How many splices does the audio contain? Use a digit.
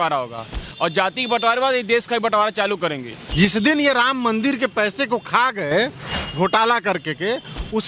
1